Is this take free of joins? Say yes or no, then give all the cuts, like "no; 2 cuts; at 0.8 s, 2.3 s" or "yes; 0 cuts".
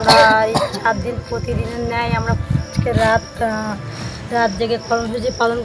yes; 0 cuts